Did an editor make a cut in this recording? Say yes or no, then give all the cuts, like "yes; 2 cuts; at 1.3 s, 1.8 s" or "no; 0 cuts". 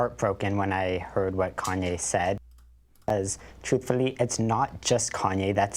no; 0 cuts